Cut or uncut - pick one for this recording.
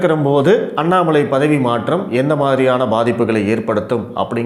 uncut